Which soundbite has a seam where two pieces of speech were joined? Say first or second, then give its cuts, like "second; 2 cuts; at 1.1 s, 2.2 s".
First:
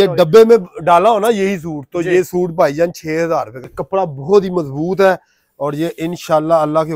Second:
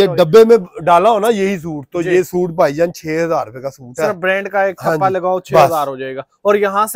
first; 1 cut; at 3.7 s